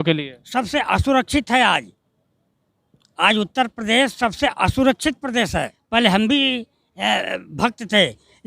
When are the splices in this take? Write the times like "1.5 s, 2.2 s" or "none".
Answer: 5.7 s

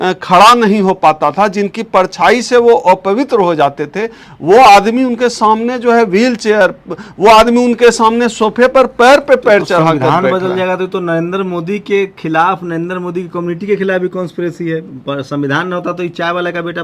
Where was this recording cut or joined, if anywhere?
none

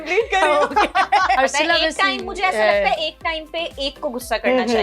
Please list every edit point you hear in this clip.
1.4 s

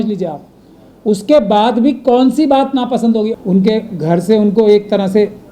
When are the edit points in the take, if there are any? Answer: 3.3 s

